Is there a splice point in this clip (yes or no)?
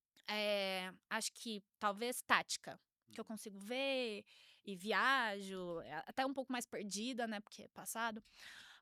no